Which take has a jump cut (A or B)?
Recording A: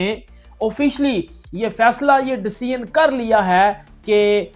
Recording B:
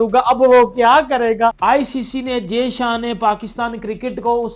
B